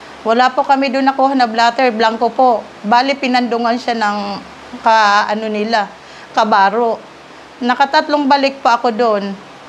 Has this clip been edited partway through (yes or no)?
no